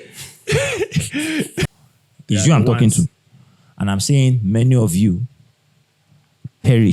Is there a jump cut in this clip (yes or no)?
yes